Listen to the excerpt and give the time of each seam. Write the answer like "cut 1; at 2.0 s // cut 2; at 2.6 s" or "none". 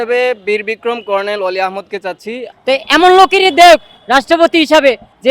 cut 1; at 2.4 s